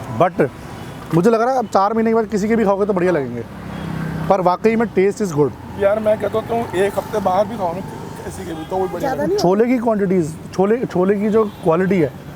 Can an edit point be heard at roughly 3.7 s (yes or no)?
no